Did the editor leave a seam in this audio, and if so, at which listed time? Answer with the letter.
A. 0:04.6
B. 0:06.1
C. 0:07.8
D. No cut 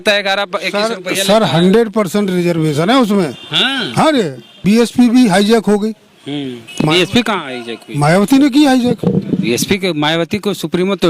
A